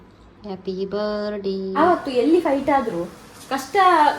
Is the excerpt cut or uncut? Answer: cut